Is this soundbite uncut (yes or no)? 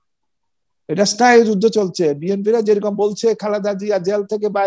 yes